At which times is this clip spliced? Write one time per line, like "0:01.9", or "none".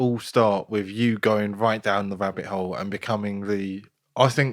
none